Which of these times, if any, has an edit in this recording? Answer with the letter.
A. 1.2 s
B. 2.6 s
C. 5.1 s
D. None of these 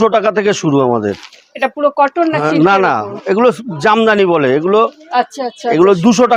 D